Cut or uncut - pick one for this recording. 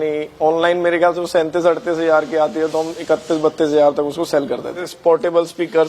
cut